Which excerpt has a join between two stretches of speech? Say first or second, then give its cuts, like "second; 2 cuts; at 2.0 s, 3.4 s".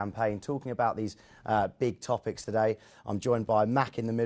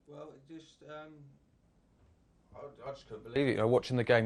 first; 1 cut; at 1.4 s